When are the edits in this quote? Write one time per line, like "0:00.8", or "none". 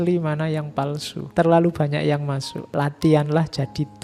0:01.2
0:02.5

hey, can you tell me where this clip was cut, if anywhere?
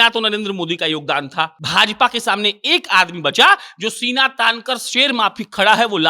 0:01.6

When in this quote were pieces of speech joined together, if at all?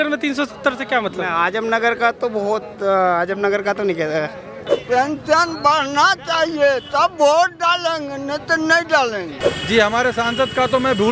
0:04.8
0:09.4

